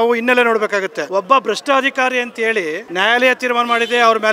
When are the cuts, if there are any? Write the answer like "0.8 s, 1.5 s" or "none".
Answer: 1.0 s, 2.8 s